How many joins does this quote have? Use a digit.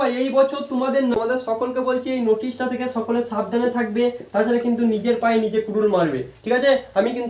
1